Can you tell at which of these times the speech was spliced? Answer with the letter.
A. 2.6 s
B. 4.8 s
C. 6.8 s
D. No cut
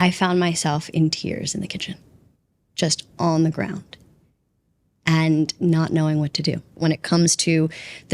C